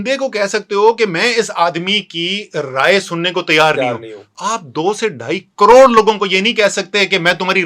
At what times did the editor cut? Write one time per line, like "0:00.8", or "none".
none